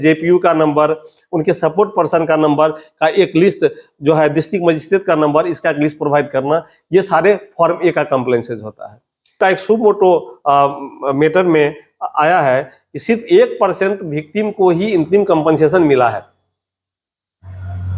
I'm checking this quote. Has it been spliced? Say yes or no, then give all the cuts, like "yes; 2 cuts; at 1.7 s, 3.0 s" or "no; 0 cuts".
yes; 1 cut; at 9.4 s